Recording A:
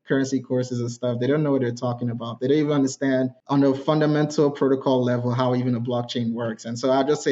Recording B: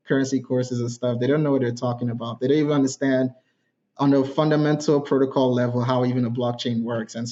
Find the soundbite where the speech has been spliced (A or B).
A